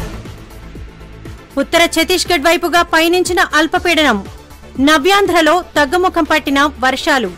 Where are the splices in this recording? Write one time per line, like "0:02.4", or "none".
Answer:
0:01.2